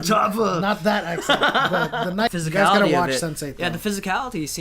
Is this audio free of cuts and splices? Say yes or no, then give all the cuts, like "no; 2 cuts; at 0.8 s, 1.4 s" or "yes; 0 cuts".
no; 1 cut; at 2.3 s